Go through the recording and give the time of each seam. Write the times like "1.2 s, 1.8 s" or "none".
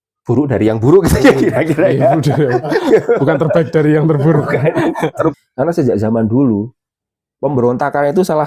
5.4 s